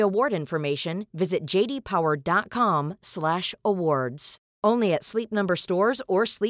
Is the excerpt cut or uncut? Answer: uncut